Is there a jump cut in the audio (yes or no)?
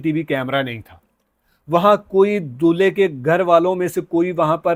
no